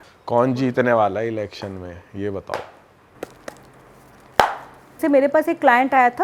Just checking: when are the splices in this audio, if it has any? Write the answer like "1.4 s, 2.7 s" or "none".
4.9 s